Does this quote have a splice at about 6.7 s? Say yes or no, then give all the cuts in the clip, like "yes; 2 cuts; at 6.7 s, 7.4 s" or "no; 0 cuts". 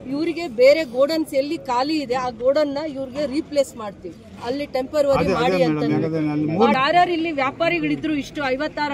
yes; 1 cut; at 6.7 s